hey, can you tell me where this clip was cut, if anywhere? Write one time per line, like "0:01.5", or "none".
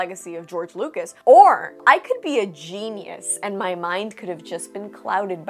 0:01.1
0:01.7